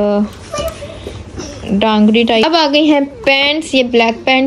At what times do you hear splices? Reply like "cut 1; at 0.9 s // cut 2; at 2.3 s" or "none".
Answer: cut 1; at 2.4 s